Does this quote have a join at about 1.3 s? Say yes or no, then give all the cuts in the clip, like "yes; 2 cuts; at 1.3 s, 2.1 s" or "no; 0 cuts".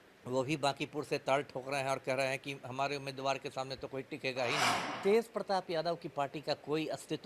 no; 1 cut; at 4.8 s